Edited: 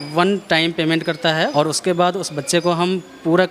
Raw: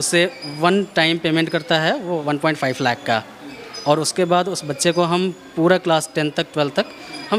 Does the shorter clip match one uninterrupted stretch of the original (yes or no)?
no